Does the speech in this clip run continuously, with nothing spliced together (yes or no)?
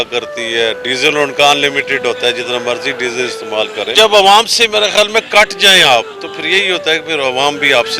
no